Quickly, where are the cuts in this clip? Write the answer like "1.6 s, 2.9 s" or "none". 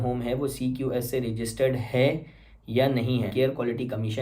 3.3 s

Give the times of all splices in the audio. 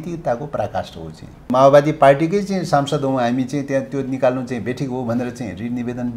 1.5 s

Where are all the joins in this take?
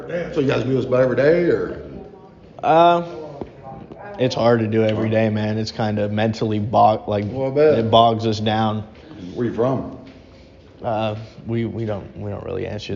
none

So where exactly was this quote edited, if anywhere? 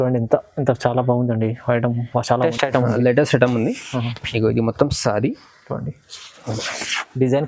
2.4 s

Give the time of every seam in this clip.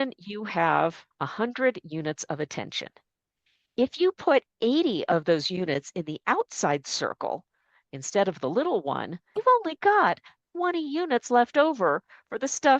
1.1 s

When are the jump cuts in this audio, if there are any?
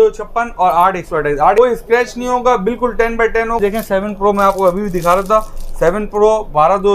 1.6 s, 3.6 s

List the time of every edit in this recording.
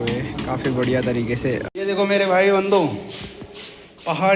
1.7 s

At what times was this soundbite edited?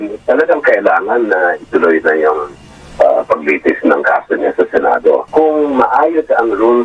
5.3 s

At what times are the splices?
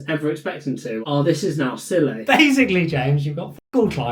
1.0 s, 2.2 s

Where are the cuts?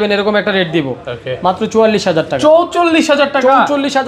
none

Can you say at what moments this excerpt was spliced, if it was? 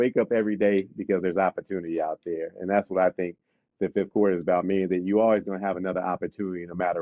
none

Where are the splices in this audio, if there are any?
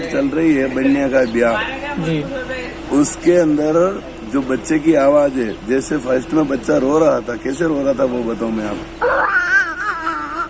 8.8 s

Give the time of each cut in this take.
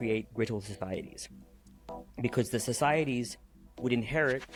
none

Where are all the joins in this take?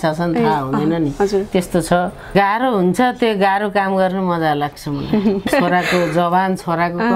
2.3 s, 5.5 s

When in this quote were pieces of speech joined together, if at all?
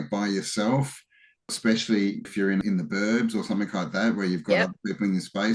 1.5 s, 2.5 s

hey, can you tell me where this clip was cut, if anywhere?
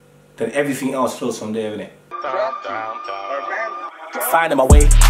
2.1 s

